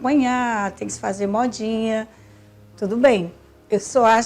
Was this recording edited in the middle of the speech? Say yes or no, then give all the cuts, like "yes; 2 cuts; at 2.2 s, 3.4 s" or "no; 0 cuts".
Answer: no; 0 cuts